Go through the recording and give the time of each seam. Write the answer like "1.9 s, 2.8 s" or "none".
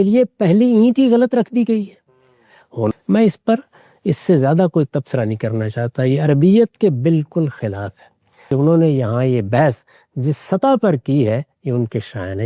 2.9 s, 8.5 s